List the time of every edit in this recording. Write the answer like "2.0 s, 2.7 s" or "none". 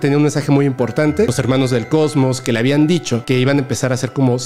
1.3 s, 3.2 s